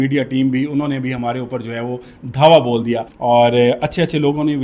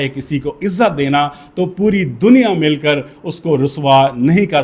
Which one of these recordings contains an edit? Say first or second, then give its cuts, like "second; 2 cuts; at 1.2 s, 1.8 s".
first; 1 cut; at 3.1 s